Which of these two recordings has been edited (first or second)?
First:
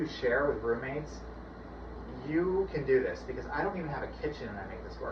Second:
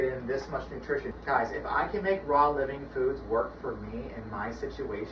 second